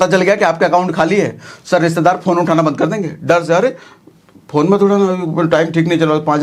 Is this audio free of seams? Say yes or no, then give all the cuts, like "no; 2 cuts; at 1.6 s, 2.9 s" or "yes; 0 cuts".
yes; 0 cuts